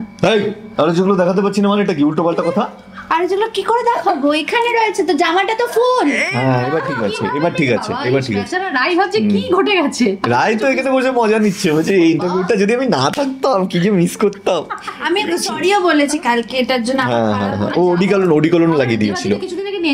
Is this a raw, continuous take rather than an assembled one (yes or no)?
yes